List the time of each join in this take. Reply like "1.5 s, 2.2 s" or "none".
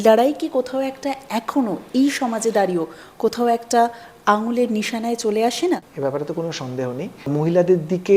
5.9 s, 7.1 s